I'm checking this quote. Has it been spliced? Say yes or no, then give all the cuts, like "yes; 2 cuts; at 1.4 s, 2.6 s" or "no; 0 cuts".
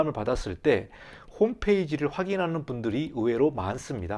no; 0 cuts